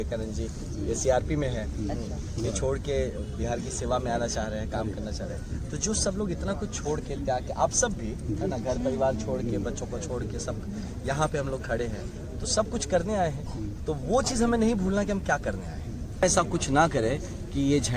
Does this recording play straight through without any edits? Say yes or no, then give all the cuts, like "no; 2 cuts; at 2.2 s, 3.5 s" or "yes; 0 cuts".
no; 1 cut; at 16.2 s